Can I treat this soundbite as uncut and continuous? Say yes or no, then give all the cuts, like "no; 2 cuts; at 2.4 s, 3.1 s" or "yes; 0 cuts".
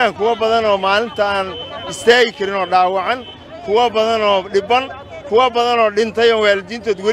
yes; 0 cuts